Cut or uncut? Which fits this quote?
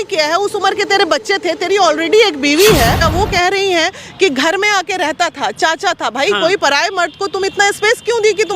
cut